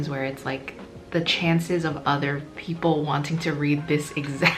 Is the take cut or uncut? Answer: uncut